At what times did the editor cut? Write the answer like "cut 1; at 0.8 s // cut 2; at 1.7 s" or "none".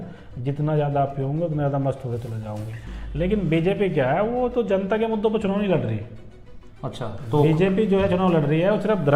cut 1; at 2.8 s